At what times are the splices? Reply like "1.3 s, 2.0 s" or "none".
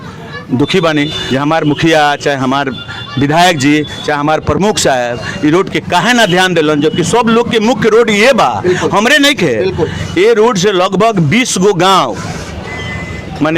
1.2 s